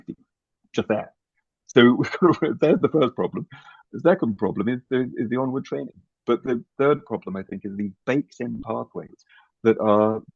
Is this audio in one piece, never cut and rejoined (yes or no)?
yes